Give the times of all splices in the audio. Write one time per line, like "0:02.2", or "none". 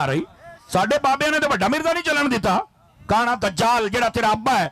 none

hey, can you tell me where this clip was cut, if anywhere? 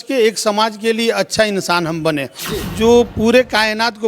0:02.6

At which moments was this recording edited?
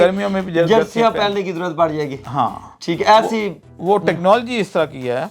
none

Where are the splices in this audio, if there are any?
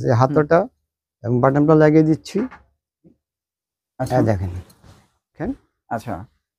0:05.5

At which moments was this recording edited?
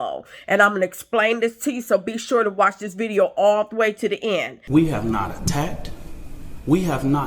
0:04.6

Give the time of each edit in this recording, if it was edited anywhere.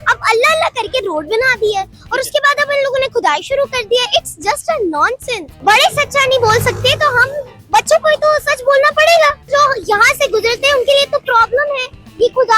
0:05.4
0:09.5

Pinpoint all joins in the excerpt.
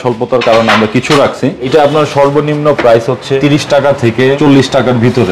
0:01.7
0:03.4
0:04.4

